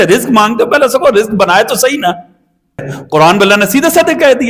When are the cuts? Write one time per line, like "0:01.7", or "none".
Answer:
0:02.9